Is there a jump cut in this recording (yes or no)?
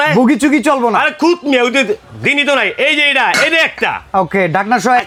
no